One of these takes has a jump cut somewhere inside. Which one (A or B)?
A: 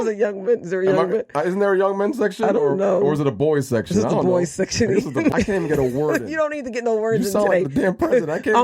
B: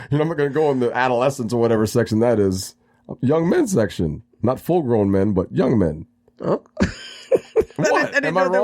A